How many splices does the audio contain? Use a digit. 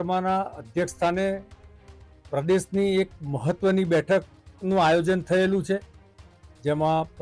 0